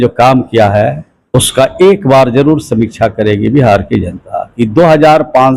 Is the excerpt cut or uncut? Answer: cut